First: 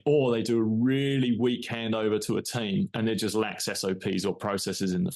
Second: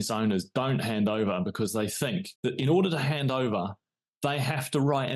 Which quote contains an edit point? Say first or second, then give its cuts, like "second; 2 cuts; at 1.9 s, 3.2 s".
second; 1 cut; at 2.3 s